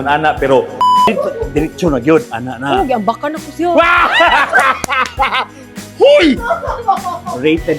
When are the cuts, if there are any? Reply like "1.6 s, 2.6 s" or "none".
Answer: 1.1 s